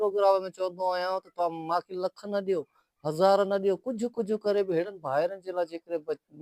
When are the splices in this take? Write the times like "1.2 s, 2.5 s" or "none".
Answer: none